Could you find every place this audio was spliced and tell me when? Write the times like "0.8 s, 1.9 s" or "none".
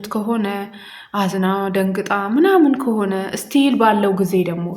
none